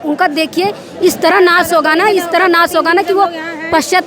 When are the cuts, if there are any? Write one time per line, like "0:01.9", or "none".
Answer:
none